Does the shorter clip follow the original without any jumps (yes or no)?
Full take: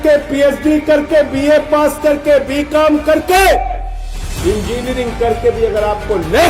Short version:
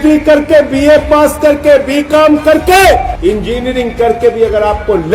no